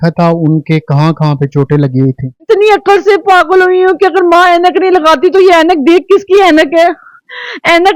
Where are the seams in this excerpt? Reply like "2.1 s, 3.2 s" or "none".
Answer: 2.3 s